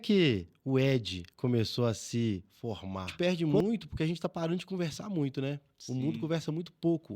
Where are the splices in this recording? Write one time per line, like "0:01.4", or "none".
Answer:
0:03.1